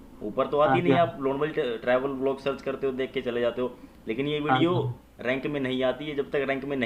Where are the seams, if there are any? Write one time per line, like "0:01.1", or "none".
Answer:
none